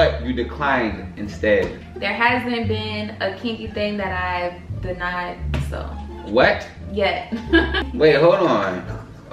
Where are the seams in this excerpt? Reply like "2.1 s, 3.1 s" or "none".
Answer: 1.8 s, 7.9 s